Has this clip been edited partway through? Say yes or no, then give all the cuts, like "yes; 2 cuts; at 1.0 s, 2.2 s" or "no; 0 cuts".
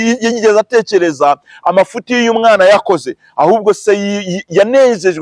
no; 0 cuts